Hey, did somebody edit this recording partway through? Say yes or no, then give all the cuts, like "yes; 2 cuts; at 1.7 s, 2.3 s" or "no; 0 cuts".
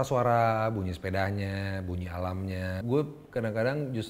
yes; 1 cut; at 2.8 s